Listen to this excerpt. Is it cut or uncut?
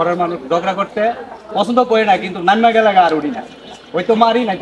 uncut